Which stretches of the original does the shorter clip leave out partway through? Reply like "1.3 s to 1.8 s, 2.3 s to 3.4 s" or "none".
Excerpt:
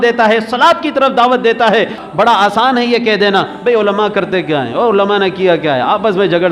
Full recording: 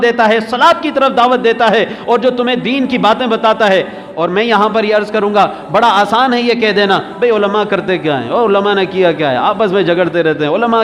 2.0 s to 5.6 s